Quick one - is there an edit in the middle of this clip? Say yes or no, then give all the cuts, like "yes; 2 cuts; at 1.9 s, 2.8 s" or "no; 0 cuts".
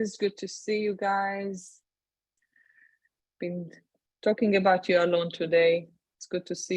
yes; 1 cut; at 5.0 s